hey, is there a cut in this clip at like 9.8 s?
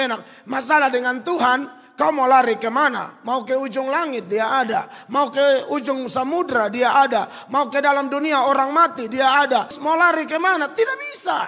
yes; 1 cut; at 9.8 s

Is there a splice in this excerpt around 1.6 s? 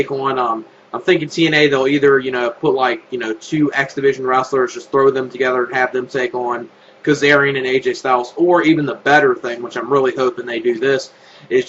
no; 1 cut; at 4.8 s

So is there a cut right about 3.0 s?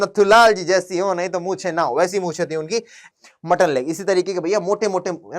yes; 1 cut; at 3.0 s

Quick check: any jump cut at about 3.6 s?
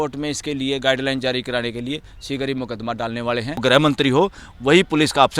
yes; 1 cut; at 3.6 s

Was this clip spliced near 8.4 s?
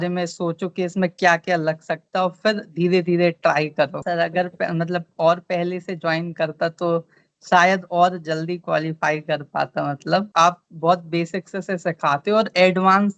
no; 2 cuts; at 4.0 s, 10.3 s

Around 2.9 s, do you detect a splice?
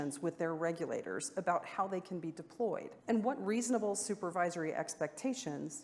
yes; 1 cut; at 2.9 s

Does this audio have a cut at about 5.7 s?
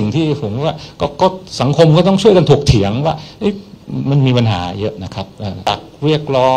yes; 1 cut; at 5.7 s

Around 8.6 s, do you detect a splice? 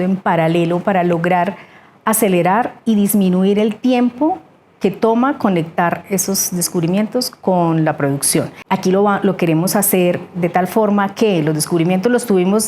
yes; 1 cut; at 8.6 s

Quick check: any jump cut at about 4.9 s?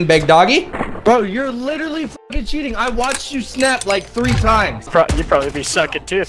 yes; 1 cut; at 4.9 s

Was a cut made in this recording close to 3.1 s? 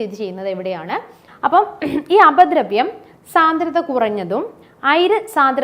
no; 1 cut; at 1.2 s

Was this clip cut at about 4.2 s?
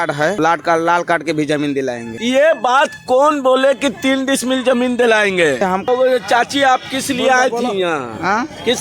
no; 1 cut; at 5.8 s

